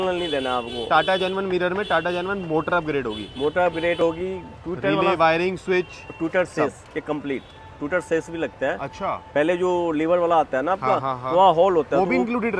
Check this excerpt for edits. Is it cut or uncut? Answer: uncut